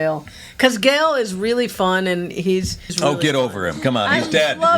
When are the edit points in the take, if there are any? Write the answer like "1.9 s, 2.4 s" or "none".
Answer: 2.9 s